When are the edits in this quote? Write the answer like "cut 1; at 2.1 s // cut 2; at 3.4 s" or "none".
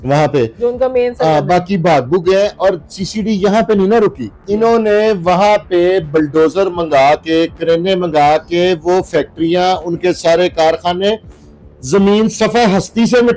cut 1; at 4.3 s